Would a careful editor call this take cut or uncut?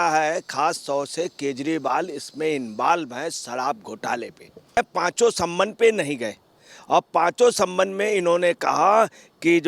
cut